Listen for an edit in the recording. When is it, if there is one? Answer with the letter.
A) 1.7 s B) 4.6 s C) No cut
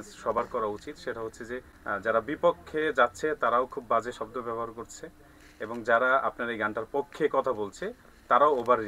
A